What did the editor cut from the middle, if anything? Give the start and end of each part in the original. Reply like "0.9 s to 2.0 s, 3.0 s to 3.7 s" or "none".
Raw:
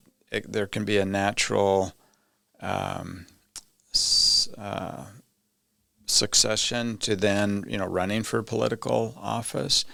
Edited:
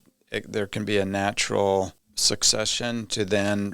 2.1 s to 6.0 s